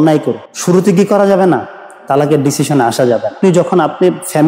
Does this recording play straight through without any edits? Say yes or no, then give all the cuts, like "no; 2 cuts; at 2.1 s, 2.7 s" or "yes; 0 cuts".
no; 1 cut; at 3.3 s